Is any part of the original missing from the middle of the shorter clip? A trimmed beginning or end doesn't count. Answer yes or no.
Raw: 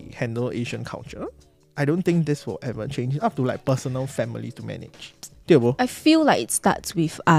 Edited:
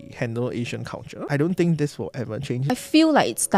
yes